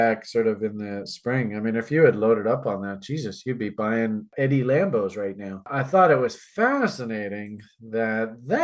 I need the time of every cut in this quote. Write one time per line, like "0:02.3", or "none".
0:04.3
0:05.7